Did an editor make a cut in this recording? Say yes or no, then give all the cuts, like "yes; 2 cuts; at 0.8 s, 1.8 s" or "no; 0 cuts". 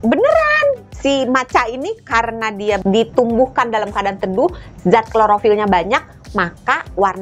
yes; 2 cuts; at 0.9 s, 2.8 s